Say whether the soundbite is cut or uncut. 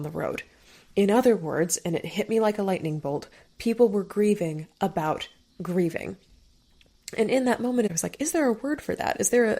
cut